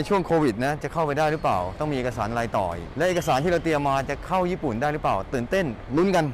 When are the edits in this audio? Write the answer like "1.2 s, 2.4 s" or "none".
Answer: 1.7 s